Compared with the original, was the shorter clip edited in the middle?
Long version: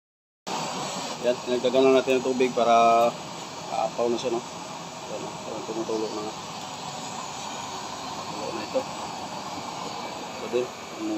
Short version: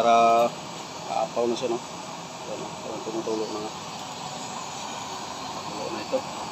no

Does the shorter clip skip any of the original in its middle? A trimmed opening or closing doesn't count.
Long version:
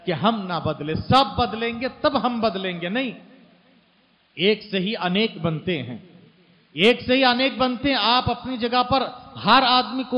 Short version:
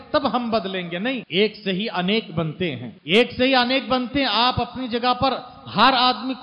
yes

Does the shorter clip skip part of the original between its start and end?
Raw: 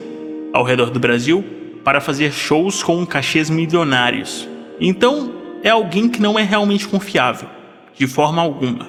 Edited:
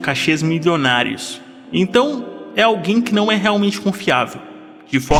no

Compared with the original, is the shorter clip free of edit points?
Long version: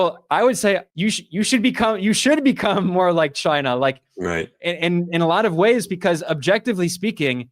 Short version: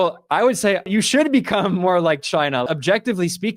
no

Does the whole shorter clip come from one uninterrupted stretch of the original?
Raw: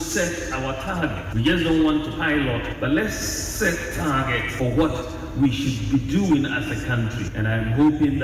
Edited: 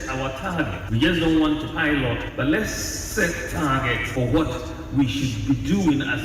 yes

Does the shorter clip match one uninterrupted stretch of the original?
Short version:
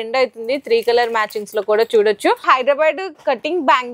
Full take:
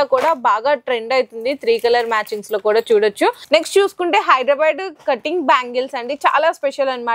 no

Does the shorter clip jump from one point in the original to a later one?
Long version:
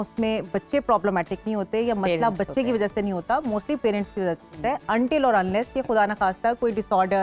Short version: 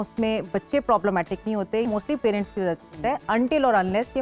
yes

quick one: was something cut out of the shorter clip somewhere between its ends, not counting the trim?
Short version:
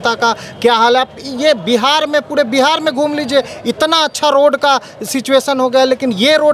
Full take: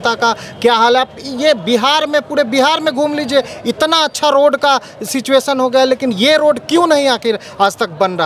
no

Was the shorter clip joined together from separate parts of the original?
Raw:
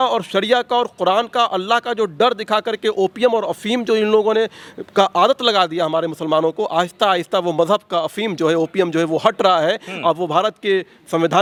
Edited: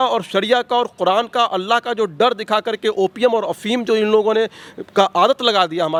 no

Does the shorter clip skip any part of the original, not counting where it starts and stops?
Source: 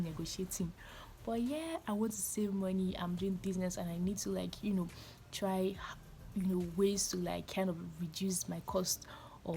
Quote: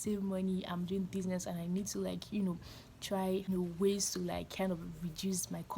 yes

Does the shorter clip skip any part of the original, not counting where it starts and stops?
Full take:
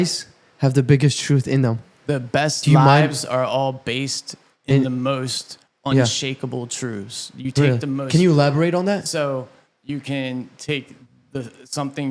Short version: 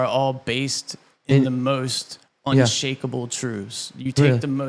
no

